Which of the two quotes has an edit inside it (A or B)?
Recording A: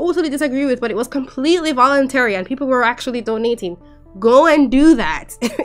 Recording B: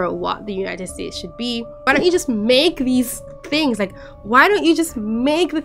B